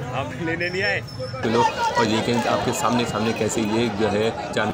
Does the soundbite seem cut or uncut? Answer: cut